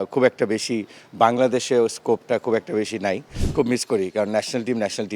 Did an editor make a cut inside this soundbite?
yes; 1 cut; at 3.4 s

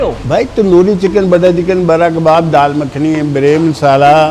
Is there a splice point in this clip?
no; 0 cuts

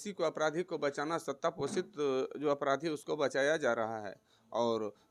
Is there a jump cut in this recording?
no; 0 cuts

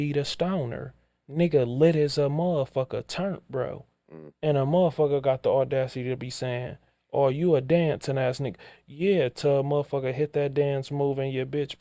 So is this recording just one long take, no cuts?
yes; 0 cuts

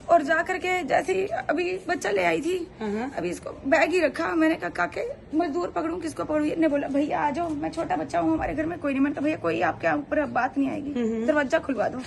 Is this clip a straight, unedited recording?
yes; 0 cuts

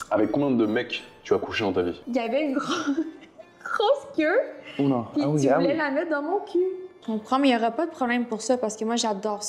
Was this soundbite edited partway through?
yes; 2 cuts; at 2.0 s, 7.0 s

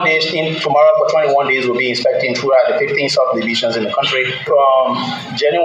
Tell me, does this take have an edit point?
yes; 1 cut; at 4.5 s

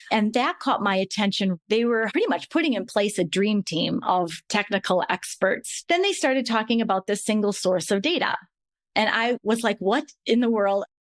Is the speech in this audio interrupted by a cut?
yes; 1 cut; at 5.7 s

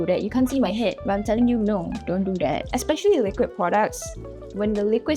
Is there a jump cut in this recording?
no; 0 cuts

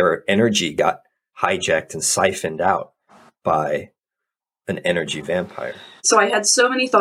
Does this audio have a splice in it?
yes; 1 cut; at 6.0 s

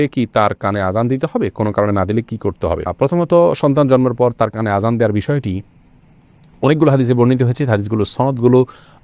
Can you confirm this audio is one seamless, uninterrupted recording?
yes; 0 cuts

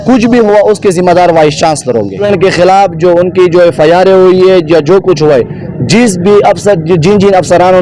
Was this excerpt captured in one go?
no; 1 cut; at 2.2 s

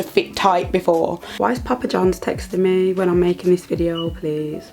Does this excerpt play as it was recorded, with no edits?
no; 1 cut; at 1.2 s

